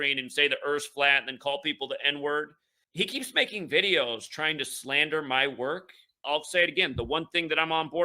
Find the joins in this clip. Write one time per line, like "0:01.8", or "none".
0:02.8
0:06.1